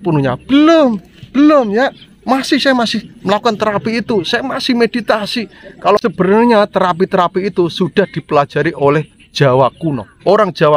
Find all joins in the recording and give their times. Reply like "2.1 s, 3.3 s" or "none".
6.0 s